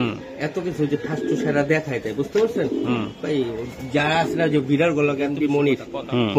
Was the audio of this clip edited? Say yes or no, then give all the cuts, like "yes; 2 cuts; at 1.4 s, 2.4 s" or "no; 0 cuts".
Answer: yes; 1 cut; at 5.4 s